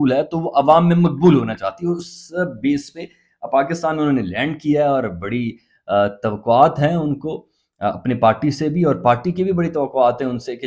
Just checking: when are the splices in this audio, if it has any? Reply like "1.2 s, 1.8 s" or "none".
none